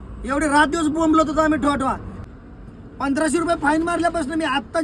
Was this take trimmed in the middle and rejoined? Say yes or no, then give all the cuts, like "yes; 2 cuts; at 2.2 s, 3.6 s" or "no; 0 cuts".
yes; 1 cut; at 2.1 s